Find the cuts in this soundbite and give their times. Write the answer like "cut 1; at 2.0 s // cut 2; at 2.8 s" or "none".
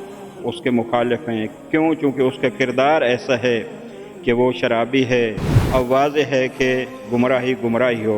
cut 1; at 5.6 s